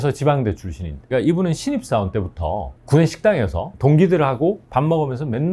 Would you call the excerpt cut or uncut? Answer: cut